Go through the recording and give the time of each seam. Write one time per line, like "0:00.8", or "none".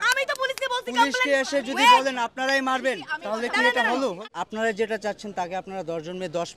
0:04.2